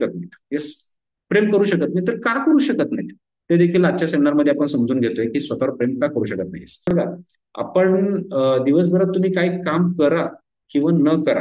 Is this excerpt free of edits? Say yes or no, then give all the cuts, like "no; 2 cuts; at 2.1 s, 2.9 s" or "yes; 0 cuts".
no; 1 cut; at 6.8 s